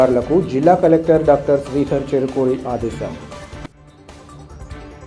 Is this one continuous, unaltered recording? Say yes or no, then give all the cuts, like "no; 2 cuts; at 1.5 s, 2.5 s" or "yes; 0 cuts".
yes; 0 cuts